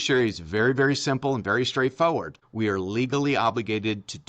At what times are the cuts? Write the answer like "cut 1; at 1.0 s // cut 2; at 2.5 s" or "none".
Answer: cut 1; at 2.4 s